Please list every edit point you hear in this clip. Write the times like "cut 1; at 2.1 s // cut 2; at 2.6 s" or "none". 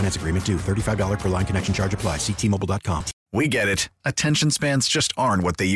cut 1; at 3.2 s